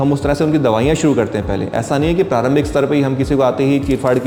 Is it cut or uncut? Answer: uncut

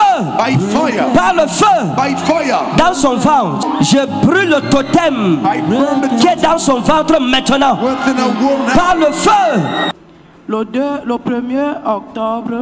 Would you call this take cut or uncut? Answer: cut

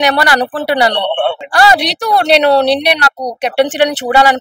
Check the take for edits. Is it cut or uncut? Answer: cut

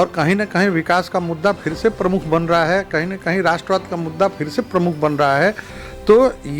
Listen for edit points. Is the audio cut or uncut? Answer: uncut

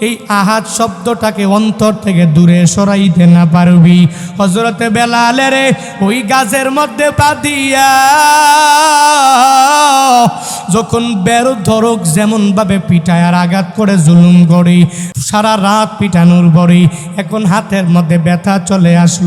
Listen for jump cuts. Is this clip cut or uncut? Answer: cut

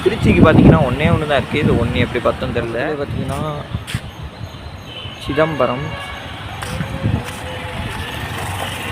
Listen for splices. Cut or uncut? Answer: cut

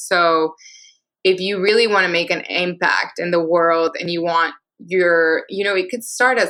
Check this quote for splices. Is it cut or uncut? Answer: uncut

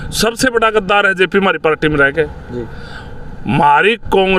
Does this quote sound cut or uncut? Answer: uncut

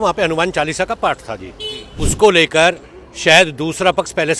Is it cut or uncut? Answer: cut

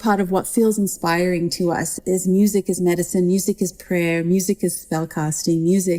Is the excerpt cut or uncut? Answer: cut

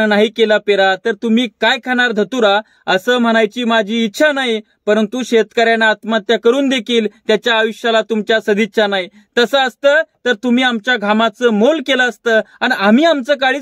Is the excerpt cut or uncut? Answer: uncut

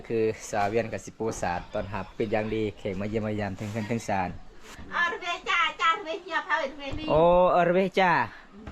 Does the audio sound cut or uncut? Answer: cut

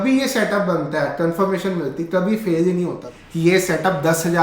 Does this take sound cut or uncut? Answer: cut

